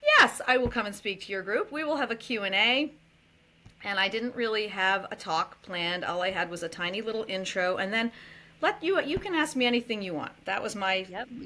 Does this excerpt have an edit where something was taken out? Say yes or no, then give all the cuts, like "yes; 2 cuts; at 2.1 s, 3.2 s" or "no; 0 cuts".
no; 0 cuts